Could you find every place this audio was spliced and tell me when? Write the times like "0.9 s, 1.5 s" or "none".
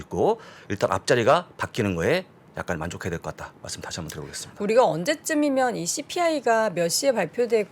none